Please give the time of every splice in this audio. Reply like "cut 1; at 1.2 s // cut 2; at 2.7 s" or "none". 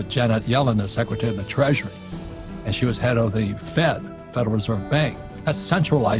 cut 1; at 5.3 s

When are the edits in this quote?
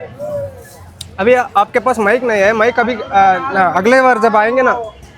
none

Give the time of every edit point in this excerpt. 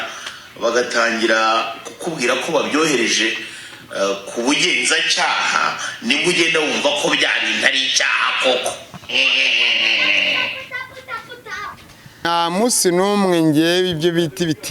cut 1; at 12.3 s

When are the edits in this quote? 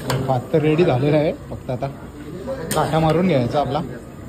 none

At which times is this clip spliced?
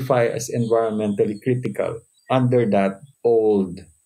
cut 1; at 2.1 s // cut 2; at 3.1 s

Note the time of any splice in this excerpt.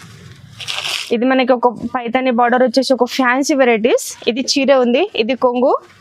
cut 1; at 1.0 s

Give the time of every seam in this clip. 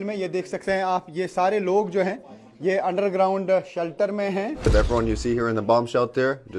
cut 1; at 4.7 s

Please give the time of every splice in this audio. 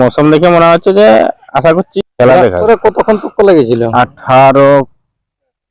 cut 1; at 1.9 s // cut 2; at 2.6 s

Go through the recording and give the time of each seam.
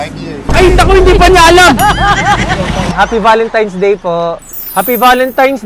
cut 1; at 2.9 s // cut 2; at 4.6 s

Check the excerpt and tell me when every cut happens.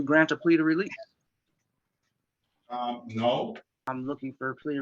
cut 1; at 3.8 s

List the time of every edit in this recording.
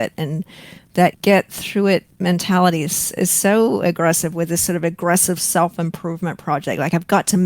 cut 1; at 1.2 s // cut 2; at 2.1 s

